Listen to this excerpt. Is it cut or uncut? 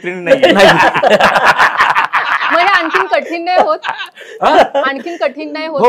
uncut